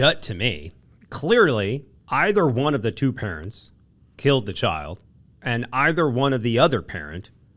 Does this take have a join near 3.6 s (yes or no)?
no